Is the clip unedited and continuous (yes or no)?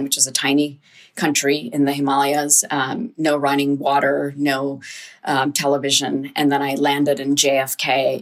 yes